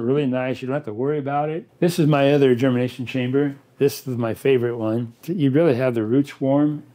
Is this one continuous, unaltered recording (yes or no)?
no